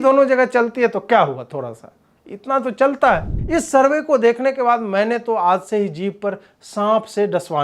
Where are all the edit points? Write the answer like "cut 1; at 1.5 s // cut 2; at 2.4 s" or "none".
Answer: cut 1; at 3.3 s